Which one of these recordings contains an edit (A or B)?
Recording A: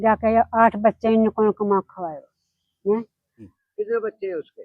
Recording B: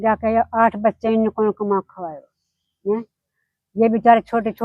A